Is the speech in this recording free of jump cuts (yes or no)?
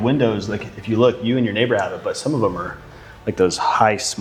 yes